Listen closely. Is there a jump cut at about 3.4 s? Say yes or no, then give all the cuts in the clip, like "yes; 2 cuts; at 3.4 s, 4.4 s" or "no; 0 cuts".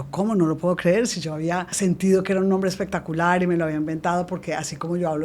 no; 1 cut; at 1.7 s